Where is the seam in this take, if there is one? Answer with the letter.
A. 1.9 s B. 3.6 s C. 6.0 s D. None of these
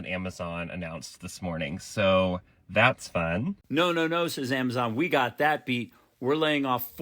B